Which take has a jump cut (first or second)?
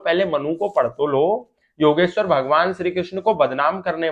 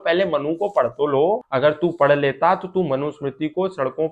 second